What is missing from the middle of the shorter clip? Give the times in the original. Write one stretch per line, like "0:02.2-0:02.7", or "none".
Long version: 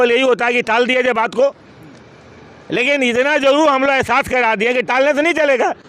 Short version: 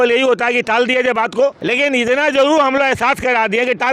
0:01.6-0:02.7